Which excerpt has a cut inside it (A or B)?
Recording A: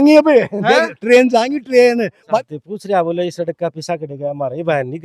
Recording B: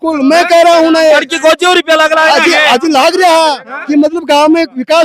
A